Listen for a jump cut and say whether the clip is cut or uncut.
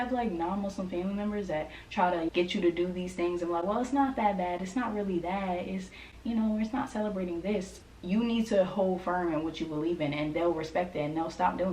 cut